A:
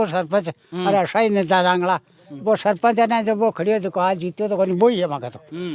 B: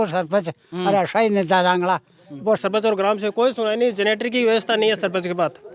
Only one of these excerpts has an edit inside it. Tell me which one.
B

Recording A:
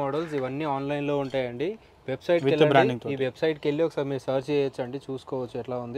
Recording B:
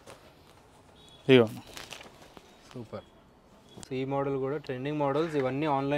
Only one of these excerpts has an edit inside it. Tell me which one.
B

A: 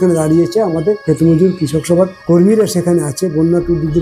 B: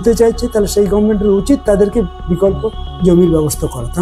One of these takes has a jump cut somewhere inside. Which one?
A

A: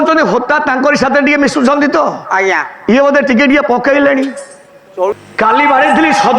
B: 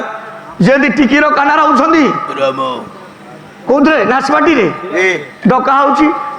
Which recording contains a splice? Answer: A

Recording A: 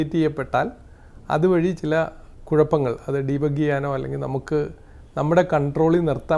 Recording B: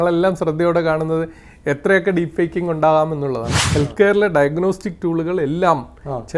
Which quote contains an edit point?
B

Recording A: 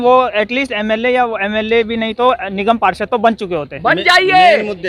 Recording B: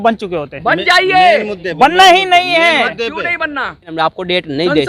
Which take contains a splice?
B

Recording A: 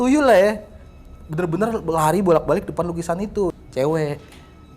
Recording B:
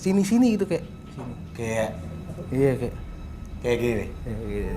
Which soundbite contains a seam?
A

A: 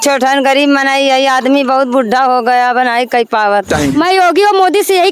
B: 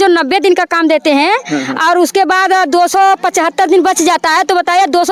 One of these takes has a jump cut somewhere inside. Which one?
A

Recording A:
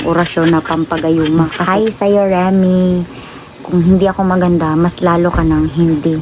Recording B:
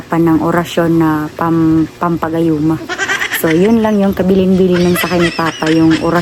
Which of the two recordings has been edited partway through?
A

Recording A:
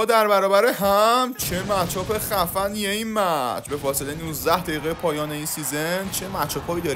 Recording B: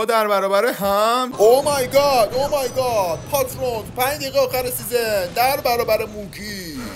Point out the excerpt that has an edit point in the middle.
B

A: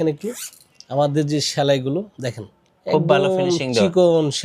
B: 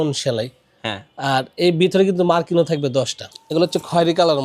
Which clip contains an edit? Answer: B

